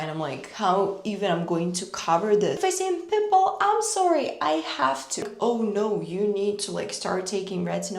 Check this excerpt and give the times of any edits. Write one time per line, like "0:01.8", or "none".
0:02.6
0:05.3